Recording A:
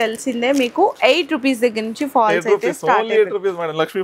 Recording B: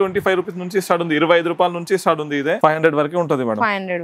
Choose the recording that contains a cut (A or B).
B